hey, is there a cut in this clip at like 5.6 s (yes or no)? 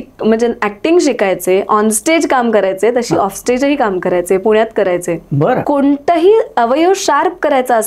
yes